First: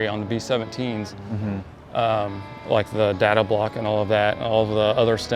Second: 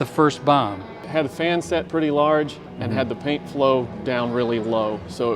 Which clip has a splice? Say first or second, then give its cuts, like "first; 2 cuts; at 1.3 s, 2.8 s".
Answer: second; 1 cut; at 1.0 s